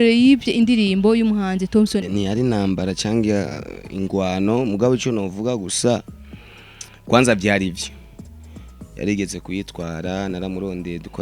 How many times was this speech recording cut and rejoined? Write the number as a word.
one